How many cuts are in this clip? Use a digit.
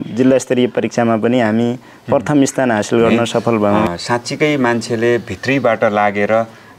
1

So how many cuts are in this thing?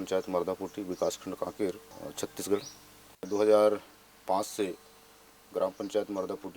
1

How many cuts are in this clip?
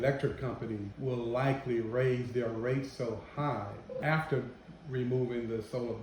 2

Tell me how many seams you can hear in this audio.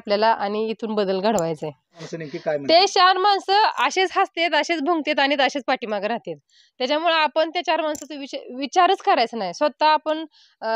1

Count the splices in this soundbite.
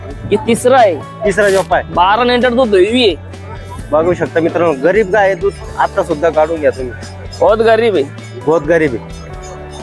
0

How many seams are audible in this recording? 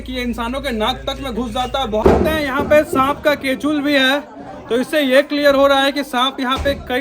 1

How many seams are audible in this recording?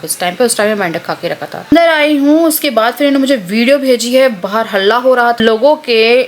2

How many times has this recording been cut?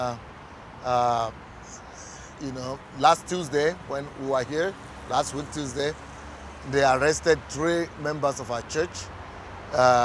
0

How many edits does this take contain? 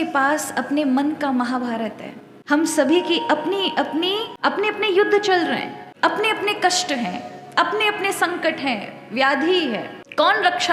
0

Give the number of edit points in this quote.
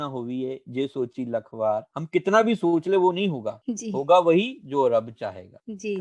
0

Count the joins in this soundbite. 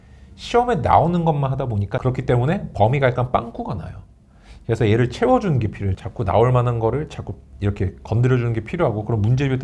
2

